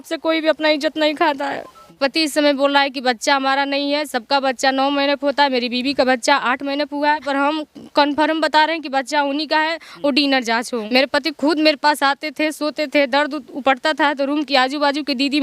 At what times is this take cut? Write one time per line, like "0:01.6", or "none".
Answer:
0:01.9
0:07.2
0:10.7